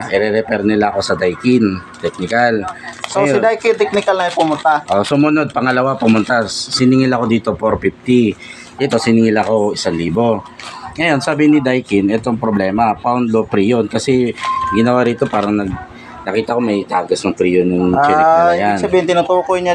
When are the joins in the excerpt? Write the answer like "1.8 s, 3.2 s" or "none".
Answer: none